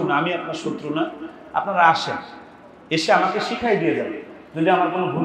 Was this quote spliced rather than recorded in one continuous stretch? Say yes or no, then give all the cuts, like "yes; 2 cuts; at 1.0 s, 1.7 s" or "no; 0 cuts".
no; 0 cuts